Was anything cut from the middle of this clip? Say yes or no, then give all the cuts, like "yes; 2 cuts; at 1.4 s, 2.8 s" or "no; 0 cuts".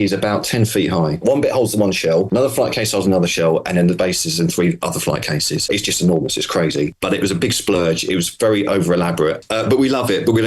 yes; 5 cuts; at 1.2 s, 2.3 s, 5.6 s, 7.0 s, 9.4 s